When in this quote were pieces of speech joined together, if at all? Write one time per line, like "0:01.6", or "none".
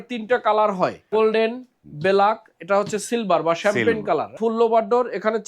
0:01.1
0:04.4